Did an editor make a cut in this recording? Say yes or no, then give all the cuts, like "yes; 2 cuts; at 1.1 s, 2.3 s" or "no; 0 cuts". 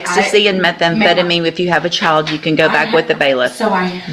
no; 0 cuts